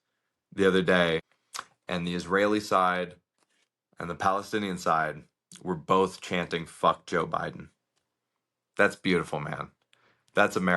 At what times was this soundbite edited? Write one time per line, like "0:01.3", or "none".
0:01.3

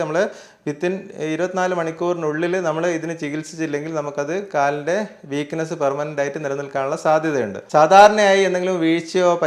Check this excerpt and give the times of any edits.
0:07.6

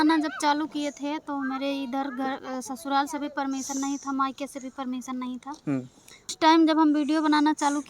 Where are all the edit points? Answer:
0:06.3

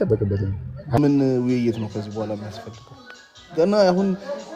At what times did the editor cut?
0:01.0

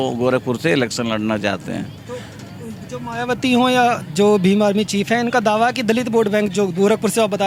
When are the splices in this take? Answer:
none

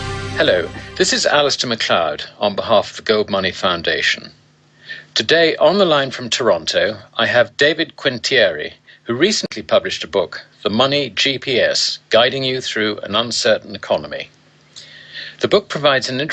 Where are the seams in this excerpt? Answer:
0:02.2

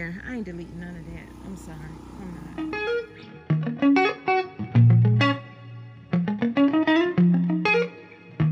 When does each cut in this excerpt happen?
0:02.5

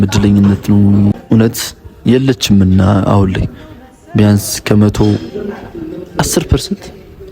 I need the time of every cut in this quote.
0:01.2

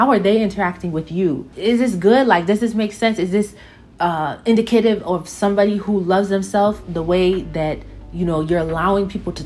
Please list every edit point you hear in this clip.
none

